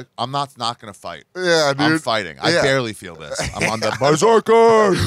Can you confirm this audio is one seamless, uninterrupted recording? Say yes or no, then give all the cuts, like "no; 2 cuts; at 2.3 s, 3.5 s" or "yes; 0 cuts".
yes; 0 cuts